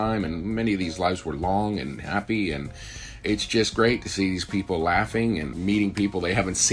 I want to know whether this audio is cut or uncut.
cut